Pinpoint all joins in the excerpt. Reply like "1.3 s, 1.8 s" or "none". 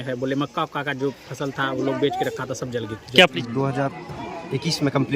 3.4 s